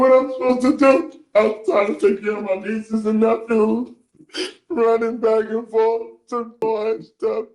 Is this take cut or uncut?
cut